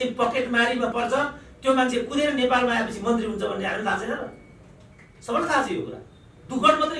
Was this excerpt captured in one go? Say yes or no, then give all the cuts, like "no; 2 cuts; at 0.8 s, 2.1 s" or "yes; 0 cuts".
no; 1 cut; at 0.9 s